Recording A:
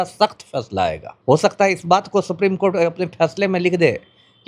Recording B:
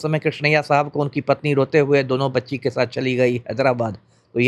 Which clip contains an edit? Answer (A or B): A